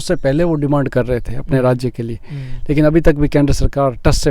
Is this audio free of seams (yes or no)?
yes